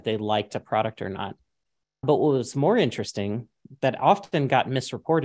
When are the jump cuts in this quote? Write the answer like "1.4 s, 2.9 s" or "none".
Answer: 2.0 s